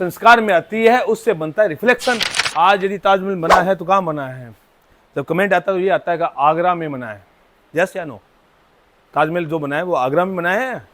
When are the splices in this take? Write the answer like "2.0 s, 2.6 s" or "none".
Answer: 2.3 s